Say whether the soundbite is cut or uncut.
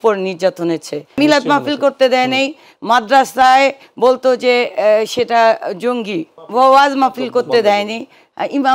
cut